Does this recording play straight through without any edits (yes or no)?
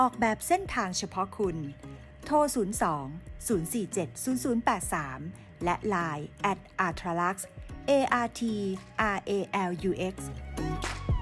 yes